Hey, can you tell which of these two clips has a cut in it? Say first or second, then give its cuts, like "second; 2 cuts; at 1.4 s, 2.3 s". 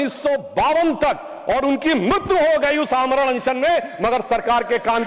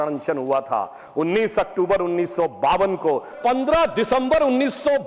second; 1 cut; at 3.3 s